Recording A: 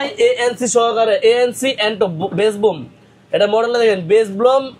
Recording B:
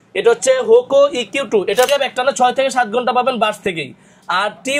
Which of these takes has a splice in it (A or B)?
B